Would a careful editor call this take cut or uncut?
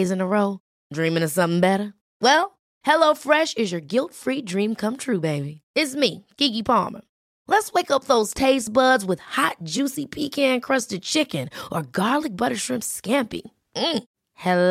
uncut